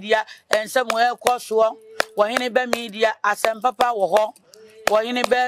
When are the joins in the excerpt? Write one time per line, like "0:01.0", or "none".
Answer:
none